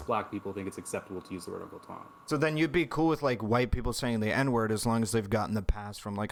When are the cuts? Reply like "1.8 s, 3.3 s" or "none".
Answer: none